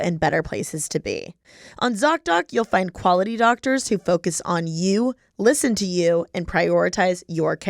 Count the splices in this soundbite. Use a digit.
1